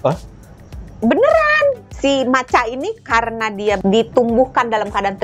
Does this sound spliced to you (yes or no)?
yes